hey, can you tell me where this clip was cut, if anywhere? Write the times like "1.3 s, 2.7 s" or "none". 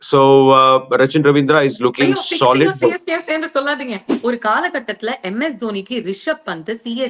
4.1 s